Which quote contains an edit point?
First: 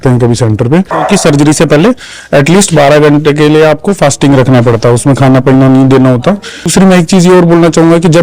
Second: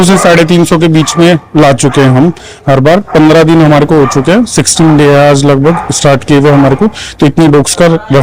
first; 2 cuts; at 0.9 s, 6.7 s

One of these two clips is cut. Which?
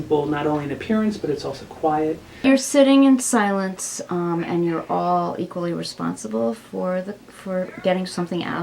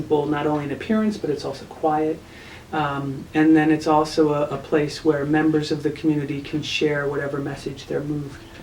first; 1 cut; at 2.3 s

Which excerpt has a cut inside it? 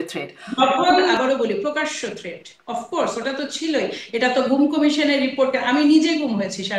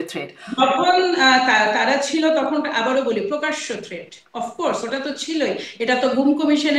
first; 1 cut; at 1.1 s

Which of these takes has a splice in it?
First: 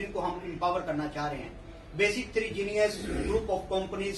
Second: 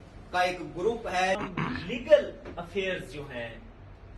second; 1 cut; at 1.4 s

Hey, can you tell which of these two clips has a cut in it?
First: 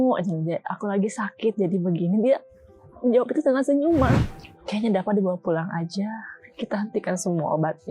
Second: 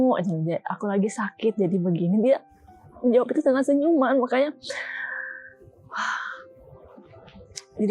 first; 1 cut; at 4.1 s

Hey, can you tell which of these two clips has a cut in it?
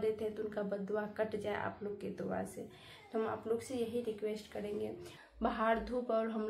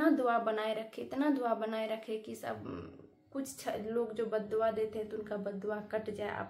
first; 1 cut; at 5.1 s

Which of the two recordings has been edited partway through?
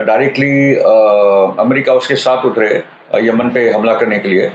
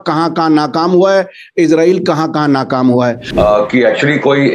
second; 1 cut; at 3.2 s

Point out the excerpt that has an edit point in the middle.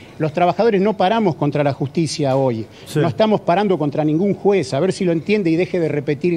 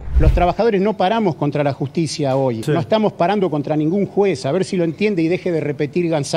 second; 1 cut; at 2.6 s

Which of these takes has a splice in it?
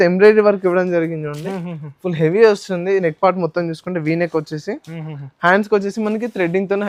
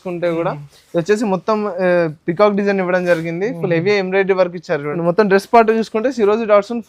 second; 1 cut; at 4.9 s

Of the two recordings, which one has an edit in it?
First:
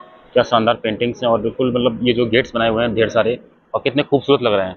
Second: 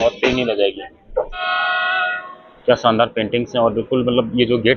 second; 1 cut; at 1.4 s

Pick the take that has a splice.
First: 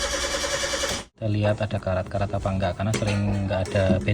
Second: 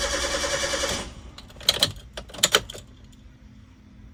first; 1 cut; at 1.1 s

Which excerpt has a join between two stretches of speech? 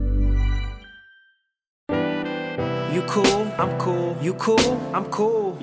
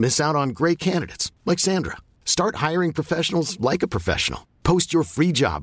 first; 1 cut; at 1.9 s

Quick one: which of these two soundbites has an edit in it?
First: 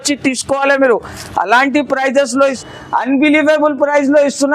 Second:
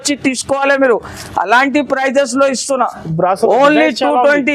first; 1 cut; at 2.6 s

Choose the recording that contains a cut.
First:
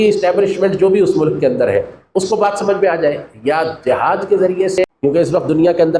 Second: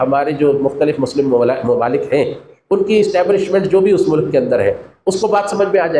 first; 1 cut; at 4.9 s

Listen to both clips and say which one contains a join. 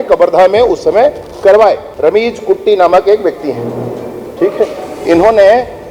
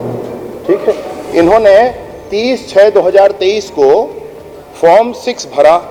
first; 1 cut; at 1.9 s

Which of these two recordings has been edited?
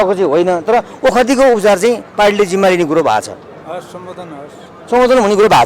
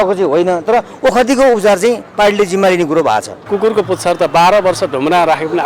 second; 1 cut; at 3.4 s

